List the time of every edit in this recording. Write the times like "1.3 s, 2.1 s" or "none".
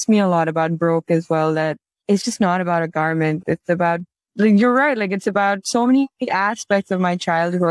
none